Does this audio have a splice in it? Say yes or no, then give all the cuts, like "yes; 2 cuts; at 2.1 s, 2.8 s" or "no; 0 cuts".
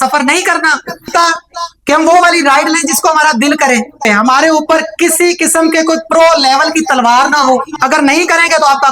yes; 3 cuts; at 1.1 s, 4.1 s, 7.7 s